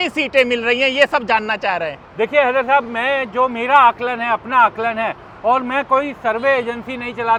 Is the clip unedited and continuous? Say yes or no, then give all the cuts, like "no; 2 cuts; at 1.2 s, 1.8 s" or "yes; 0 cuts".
yes; 0 cuts